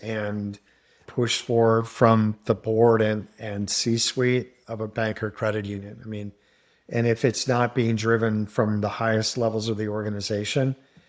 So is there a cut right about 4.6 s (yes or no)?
yes